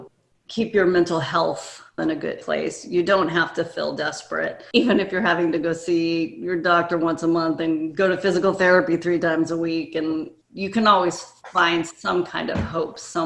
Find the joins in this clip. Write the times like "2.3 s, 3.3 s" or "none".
2.3 s, 4.6 s, 10.4 s